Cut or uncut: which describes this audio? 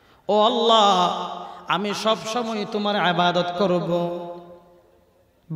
uncut